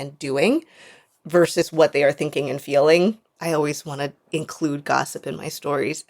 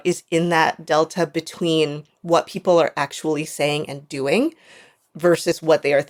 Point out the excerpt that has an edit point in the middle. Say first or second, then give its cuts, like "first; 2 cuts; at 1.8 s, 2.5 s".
first; 2 cuts; at 3.3 s, 4.2 s